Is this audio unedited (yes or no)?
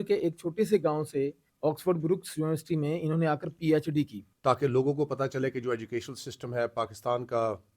no